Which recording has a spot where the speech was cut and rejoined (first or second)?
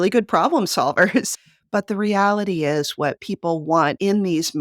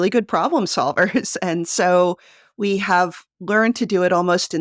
first